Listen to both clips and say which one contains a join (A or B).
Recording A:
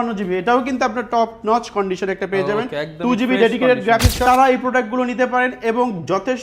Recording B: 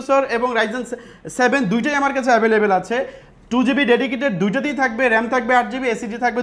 A